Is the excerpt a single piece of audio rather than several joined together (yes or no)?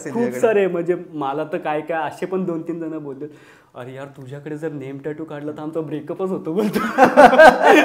yes